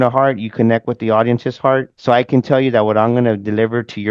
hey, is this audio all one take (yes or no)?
no